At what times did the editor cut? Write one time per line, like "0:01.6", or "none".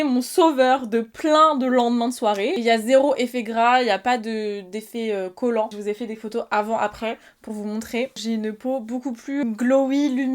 0:02.6
0:05.7
0:08.2
0:09.4